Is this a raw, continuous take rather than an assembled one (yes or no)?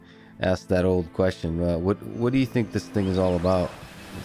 yes